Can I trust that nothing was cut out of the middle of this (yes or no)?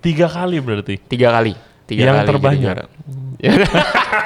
yes